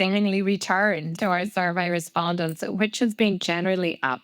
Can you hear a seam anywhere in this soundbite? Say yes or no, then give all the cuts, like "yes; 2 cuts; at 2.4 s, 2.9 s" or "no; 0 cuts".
yes; 1 cut; at 1.2 s